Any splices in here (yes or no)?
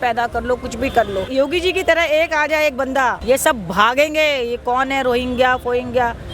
yes